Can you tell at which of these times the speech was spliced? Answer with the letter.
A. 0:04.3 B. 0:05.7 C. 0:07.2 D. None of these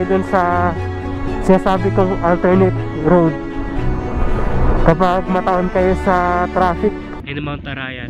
C